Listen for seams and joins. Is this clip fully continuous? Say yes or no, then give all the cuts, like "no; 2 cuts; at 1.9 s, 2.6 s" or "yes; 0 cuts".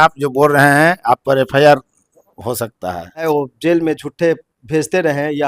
no; 1 cut; at 3.3 s